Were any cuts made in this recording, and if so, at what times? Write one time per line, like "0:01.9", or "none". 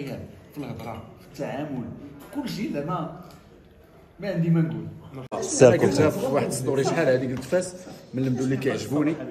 0:05.3